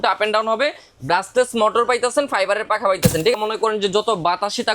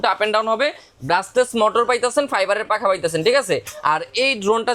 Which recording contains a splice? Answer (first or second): first